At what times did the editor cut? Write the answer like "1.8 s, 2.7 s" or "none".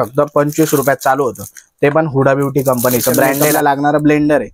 3.4 s